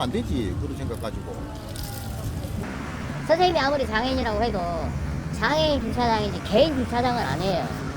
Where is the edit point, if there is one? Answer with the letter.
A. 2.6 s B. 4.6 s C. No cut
A